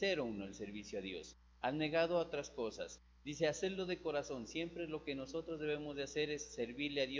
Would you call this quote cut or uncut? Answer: uncut